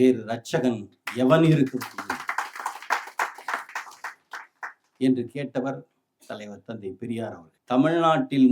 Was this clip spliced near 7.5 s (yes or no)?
yes